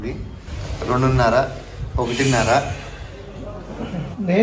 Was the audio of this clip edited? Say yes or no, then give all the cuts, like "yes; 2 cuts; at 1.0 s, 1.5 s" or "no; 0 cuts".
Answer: no; 0 cuts